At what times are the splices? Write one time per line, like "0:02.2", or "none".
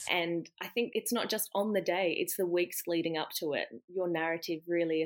0:00.9